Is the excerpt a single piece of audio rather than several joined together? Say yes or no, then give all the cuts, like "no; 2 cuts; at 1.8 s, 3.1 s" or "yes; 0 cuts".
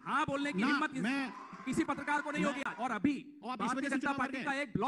no; 1 cut; at 2.8 s